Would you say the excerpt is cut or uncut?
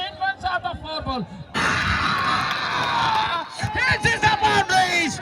cut